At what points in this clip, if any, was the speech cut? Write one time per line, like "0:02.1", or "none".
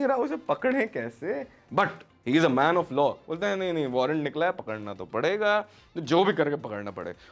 none